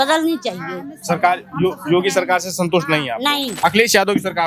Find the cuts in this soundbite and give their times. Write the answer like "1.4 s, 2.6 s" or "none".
3.5 s